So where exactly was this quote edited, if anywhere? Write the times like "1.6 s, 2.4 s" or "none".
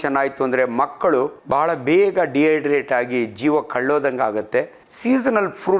1.4 s, 4.8 s